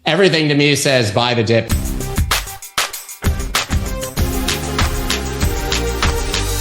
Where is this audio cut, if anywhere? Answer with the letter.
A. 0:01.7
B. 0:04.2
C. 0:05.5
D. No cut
A